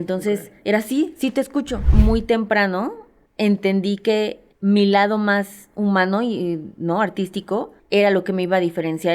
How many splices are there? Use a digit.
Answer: 1